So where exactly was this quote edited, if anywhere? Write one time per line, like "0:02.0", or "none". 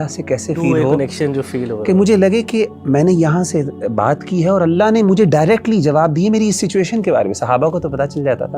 none